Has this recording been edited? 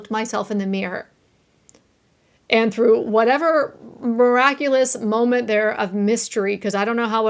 no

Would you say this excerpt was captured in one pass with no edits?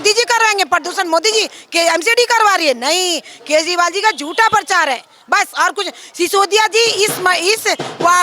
yes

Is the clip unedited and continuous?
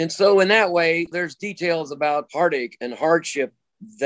no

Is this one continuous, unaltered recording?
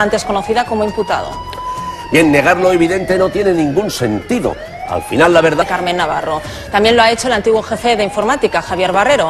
yes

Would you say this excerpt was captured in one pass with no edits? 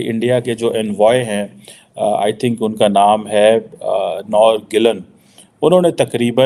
yes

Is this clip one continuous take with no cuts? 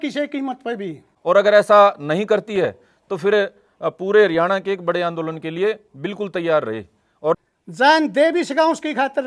no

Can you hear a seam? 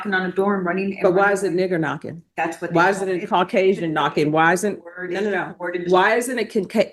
no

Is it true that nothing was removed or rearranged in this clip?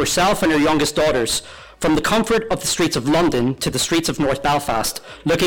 yes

